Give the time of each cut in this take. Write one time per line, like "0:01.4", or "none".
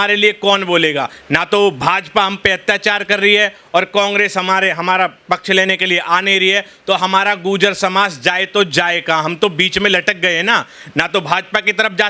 none

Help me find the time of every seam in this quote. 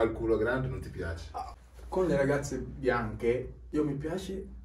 0:01.6
0:03.6

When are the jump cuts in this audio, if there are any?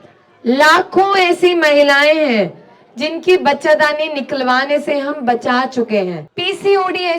0:06.2

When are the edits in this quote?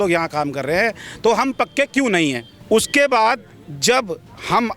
none

